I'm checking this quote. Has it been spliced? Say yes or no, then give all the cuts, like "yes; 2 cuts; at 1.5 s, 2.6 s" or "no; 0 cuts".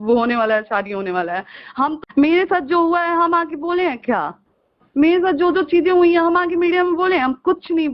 yes; 1 cut; at 2.0 s